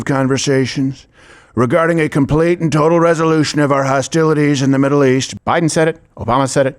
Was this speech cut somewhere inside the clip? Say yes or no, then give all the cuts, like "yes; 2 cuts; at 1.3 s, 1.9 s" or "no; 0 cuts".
yes; 1 cut; at 5.3 s